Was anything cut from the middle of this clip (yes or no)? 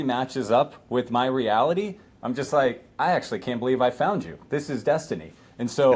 no